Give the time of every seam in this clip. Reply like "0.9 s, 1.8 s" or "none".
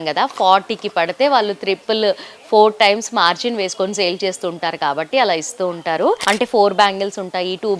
6.2 s